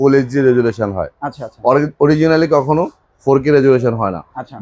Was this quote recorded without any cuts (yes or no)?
yes